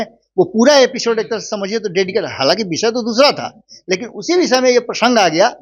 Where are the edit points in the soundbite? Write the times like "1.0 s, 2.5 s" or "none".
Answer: none